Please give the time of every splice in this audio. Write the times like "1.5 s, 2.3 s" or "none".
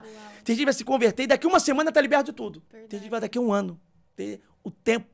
none